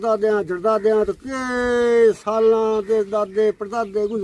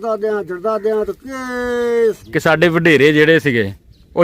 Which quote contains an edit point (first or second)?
second